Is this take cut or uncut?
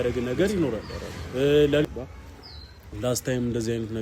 cut